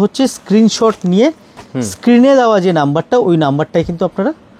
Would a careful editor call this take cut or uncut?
uncut